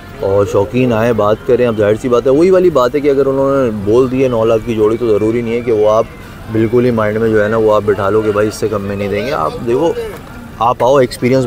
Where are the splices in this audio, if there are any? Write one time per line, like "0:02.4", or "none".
none